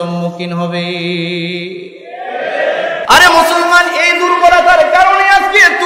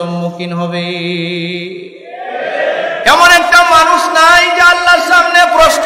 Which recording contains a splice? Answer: first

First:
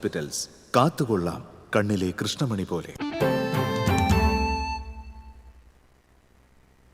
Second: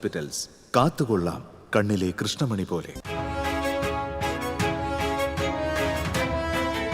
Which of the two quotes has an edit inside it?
second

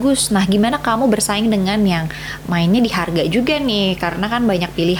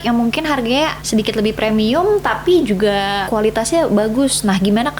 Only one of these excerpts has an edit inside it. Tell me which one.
second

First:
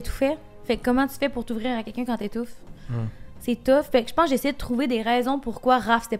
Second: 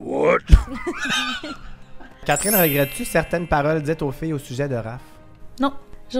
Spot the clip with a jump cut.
second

